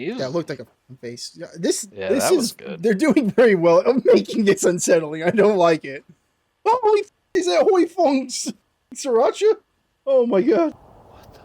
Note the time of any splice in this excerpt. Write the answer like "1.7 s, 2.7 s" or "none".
1.9 s, 10.7 s

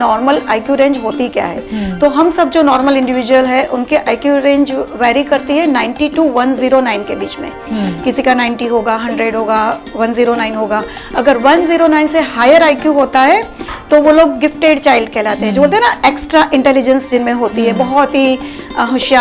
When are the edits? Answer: none

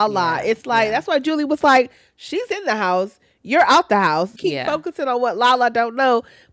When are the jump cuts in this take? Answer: 4.3 s

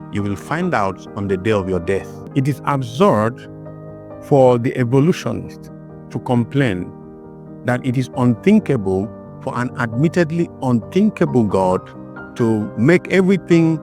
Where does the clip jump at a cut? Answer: 2.3 s

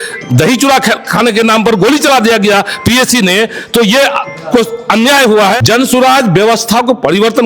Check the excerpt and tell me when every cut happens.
5.6 s

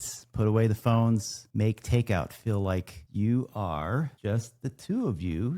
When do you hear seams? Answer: 1.4 s, 3.0 s, 4.1 s

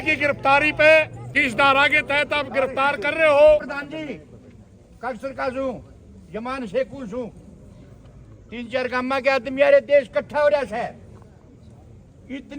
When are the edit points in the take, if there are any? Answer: 1.3 s, 3.7 s

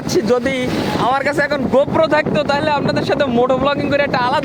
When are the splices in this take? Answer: none

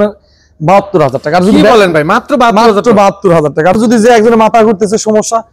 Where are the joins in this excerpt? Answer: 3.8 s

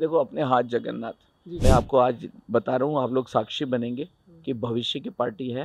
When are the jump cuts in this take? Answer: 1.4 s

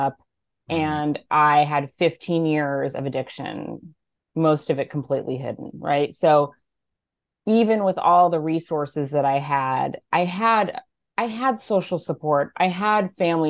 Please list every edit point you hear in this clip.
none

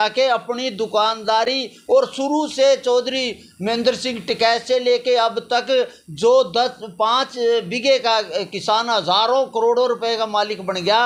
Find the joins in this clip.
none

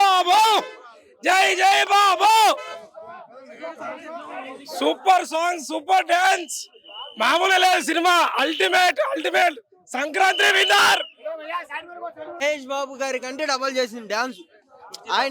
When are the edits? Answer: 12.4 s

